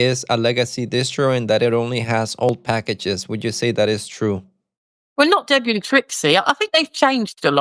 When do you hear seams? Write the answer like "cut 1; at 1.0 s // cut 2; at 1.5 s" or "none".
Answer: none